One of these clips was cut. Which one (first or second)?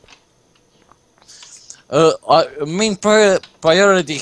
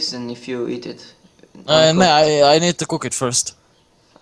first